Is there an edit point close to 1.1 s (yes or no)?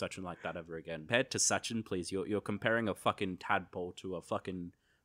yes